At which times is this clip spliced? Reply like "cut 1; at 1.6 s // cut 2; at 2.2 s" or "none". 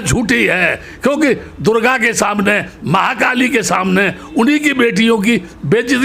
none